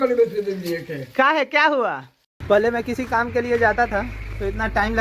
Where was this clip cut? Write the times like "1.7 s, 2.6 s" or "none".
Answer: 2.3 s